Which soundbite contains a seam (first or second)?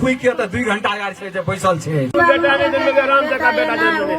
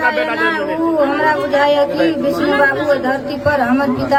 first